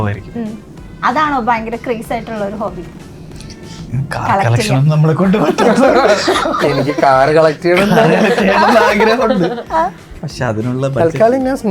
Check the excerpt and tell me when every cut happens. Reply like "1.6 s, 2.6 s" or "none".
none